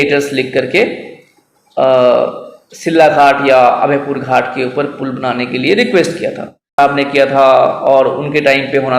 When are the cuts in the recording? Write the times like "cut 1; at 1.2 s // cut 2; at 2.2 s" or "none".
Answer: cut 1; at 6.8 s